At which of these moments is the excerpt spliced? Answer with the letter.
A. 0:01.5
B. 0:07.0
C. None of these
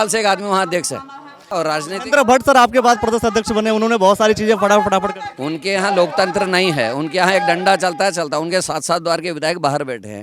A